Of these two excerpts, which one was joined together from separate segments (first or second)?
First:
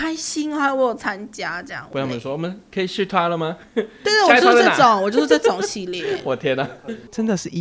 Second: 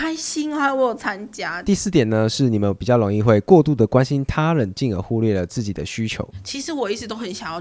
second